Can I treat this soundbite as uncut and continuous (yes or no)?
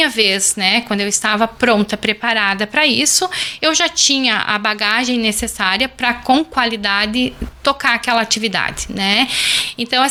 yes